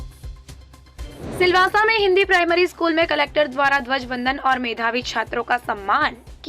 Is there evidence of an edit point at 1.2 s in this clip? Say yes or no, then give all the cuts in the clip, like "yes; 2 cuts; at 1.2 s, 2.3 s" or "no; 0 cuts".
yes; 1 cut; at 1.2 s